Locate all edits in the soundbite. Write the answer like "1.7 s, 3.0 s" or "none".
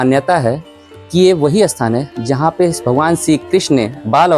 none